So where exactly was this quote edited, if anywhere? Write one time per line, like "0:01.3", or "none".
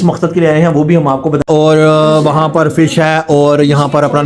0:01.4